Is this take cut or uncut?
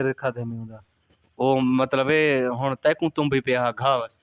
uncut